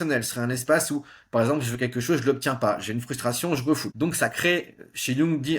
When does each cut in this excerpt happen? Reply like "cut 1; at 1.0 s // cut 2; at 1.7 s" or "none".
cut 1; at 3.9 s